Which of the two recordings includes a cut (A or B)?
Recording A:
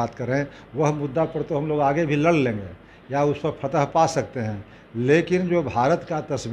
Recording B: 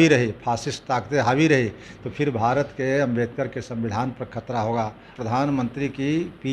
B